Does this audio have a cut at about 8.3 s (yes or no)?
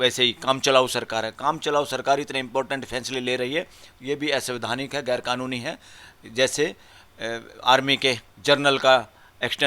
yes